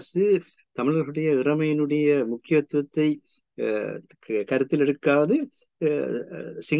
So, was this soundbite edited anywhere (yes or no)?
no